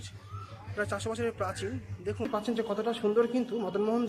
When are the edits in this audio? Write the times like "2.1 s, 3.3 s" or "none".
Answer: 2.3 s